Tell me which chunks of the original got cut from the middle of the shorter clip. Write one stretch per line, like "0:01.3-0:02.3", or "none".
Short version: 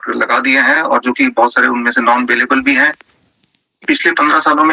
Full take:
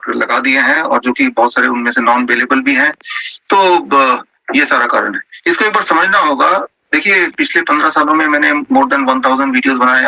0:03.5-0:07.0